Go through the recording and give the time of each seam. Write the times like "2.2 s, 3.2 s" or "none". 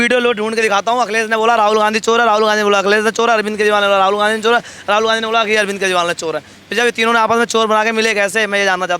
none